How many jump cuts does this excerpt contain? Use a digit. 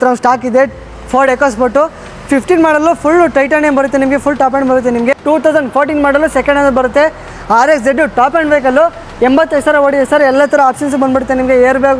1